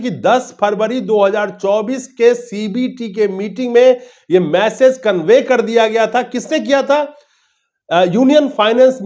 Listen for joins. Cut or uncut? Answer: uncut